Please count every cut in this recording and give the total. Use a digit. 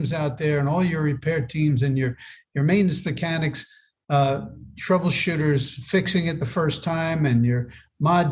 0